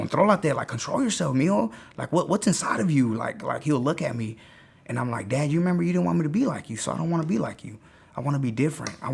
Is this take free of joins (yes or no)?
yes